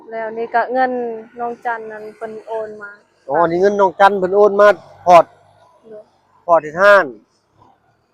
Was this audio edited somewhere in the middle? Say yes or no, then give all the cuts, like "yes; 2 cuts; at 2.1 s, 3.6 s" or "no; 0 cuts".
no; 0 cuts